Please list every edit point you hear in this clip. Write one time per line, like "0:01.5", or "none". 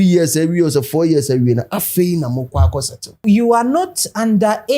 0:03.2